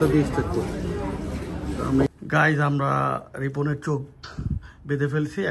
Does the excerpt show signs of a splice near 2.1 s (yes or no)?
yes